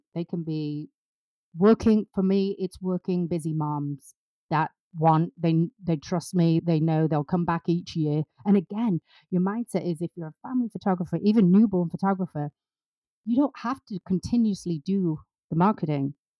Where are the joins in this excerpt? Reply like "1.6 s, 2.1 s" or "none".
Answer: 5.4 s